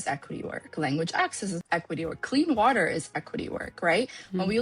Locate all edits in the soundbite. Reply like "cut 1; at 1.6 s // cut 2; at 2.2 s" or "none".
cut 1; at 1.6 s